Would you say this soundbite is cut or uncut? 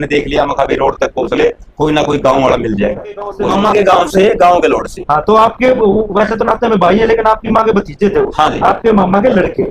cut